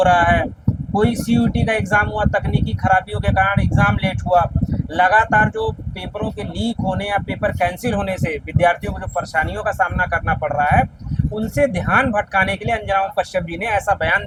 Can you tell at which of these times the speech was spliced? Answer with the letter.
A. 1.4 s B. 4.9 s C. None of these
C